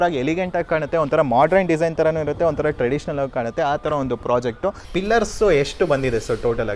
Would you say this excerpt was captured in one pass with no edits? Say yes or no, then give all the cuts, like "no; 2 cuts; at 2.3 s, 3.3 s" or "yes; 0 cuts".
no; 1 cut; at 4.8 s